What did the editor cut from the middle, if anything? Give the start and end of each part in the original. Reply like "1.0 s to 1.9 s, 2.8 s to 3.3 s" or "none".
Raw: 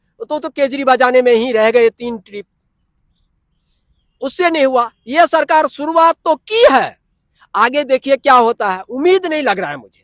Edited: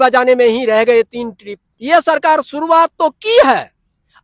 2.6 s to 5.0 s

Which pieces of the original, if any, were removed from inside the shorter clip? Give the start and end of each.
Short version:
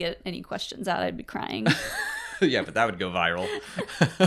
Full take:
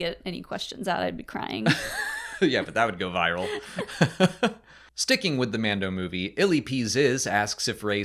none

